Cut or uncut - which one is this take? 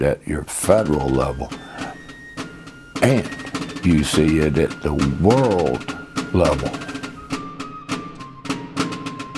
cut